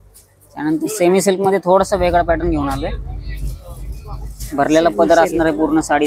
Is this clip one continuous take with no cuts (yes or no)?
yes